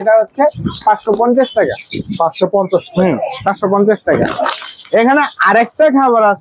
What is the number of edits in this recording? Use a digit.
0